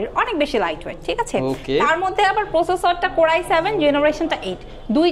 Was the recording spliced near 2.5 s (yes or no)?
no